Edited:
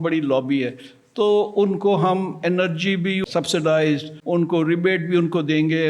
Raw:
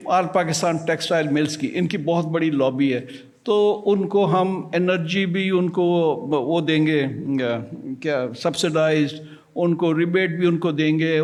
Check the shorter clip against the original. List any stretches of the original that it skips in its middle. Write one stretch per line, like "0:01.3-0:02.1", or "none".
0:05.5-0:08.3
0:09.2-0:09.4